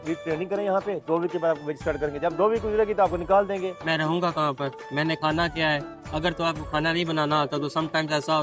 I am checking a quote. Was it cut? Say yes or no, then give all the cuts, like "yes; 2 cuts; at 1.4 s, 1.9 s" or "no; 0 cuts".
yes; 1 cut; at 3.7 s